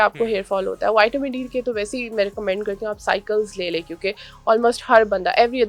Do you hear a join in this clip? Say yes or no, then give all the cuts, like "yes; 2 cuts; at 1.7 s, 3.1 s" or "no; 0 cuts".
no; 0 cuts